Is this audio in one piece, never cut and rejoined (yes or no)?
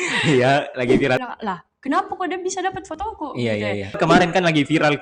no